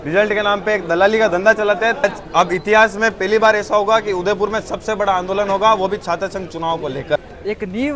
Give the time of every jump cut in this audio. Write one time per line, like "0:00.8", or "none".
0:02.0
0:07.2